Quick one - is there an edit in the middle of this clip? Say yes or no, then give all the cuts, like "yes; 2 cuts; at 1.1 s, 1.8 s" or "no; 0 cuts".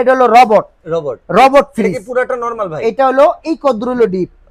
no; 0 cuts